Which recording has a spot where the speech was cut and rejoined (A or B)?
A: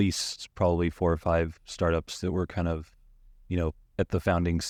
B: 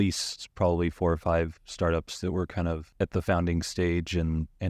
B